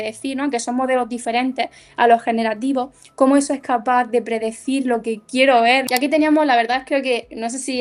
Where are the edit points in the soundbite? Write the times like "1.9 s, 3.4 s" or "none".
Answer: 5.8 s